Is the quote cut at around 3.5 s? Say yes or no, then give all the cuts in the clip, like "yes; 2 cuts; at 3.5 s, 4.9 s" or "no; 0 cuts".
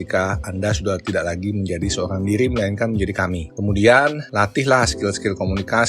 yes; 2 cuts; at 3.5 s, 4.2 s